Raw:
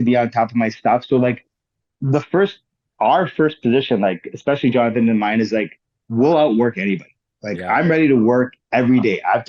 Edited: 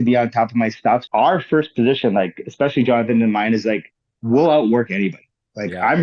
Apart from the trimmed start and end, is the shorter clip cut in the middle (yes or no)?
yes